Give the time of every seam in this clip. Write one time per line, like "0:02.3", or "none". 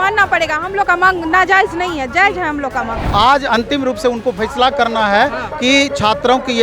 0:03.0